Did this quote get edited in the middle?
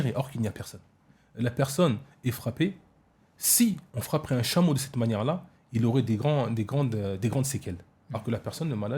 yes; 1 cut; at 1.2 s

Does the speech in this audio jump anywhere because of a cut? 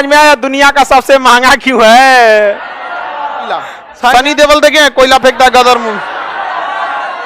yes; 1 cut; at 4.1 s

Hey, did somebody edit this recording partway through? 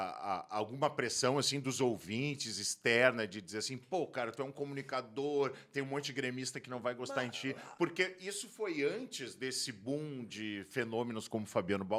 no; 0 cuts

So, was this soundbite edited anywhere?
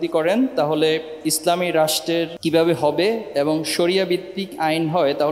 yes; 1 cut; at 2.3 s

